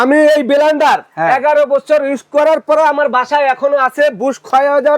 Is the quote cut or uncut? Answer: uncut